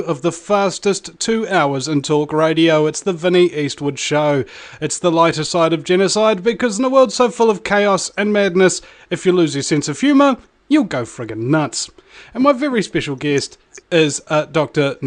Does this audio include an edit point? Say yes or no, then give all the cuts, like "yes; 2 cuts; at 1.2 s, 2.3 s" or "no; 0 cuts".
yes; 1 cut; at 3.2 s